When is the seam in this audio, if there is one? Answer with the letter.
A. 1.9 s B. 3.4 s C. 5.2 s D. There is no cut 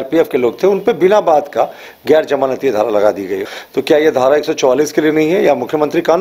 B